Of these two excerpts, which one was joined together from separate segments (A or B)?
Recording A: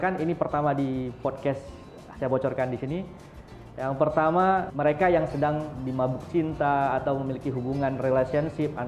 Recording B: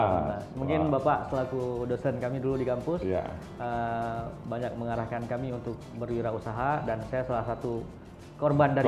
A